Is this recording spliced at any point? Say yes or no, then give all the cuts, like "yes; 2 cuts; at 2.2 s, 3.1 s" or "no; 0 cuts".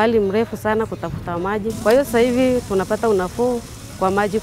yes; 1 cut; at 1.8 s